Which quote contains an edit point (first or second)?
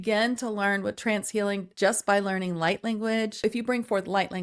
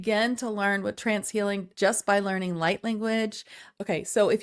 first